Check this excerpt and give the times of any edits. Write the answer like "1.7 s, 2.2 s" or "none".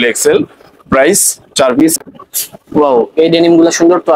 1.9 s